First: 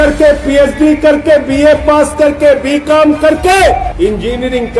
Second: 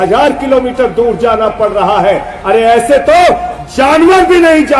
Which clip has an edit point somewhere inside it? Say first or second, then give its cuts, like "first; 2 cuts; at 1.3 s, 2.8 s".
first; 1 cut; at 3.9 s